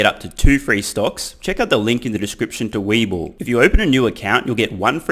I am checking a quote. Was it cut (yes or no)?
no